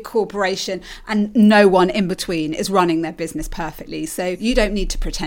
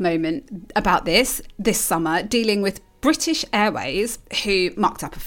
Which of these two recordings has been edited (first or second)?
first